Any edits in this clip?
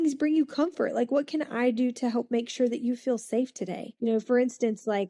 no; 0 cuts

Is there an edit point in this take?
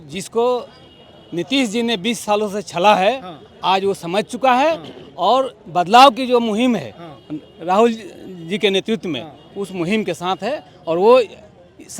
no; 0 cuts

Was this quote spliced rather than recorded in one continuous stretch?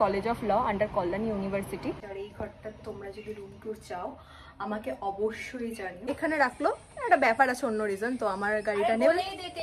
yes; 2 cuts; at 2.1 s, 6.0 s

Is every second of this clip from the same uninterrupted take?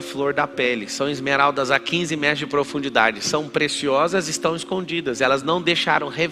yes; 0 cuts

